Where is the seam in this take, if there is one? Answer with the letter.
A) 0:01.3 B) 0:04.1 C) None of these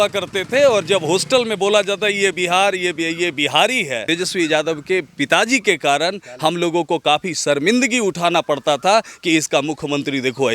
B